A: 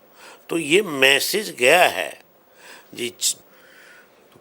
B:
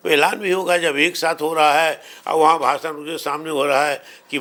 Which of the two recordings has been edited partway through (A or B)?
A